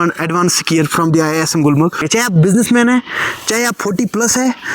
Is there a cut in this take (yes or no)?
yes